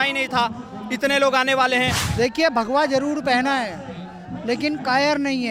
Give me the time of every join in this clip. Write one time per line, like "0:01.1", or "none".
0:02.0

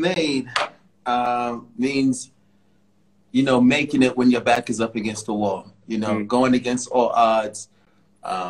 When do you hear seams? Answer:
none

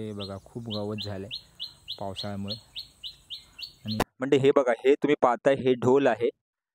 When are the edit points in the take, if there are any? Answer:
0:04.0

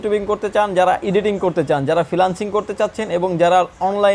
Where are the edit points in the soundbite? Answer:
none

